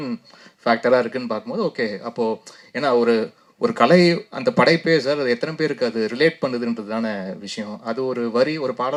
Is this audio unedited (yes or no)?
yes